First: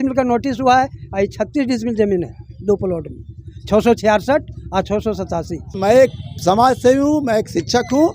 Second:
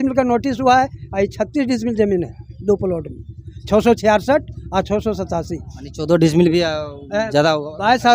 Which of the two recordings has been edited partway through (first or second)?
first